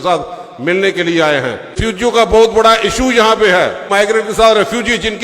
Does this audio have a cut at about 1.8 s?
yes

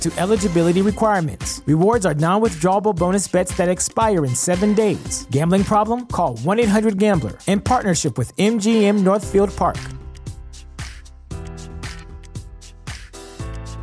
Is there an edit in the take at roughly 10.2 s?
no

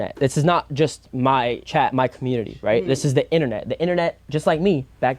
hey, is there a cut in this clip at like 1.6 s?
yes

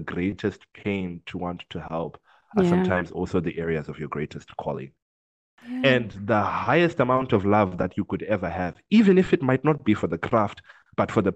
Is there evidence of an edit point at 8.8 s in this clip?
no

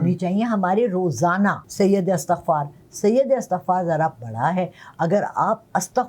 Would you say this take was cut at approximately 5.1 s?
no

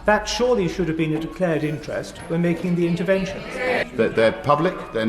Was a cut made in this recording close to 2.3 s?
no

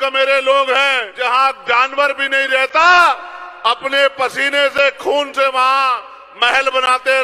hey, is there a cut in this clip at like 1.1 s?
yes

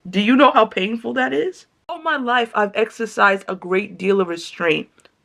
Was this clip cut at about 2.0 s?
yes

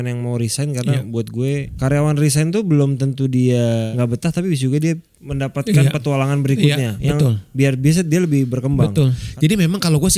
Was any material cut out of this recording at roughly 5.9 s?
no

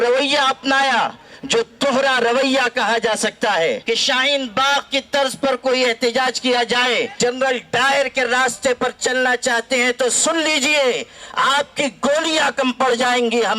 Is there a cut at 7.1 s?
yes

